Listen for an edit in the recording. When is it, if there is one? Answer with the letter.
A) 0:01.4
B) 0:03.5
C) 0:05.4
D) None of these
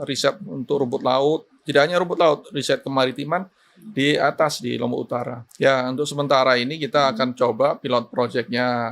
C